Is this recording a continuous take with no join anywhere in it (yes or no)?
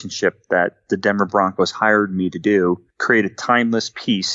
no